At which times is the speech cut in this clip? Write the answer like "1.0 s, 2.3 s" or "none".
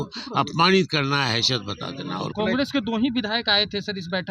2.3 s